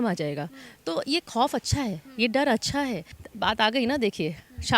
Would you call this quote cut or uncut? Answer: cut